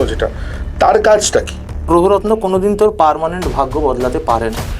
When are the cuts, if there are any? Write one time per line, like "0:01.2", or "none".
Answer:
0:01.8